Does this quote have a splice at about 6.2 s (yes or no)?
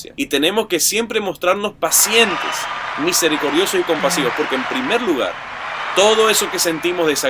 no